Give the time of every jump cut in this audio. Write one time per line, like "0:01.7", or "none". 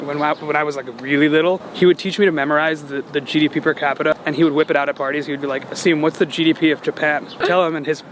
0:04.1
0:07.4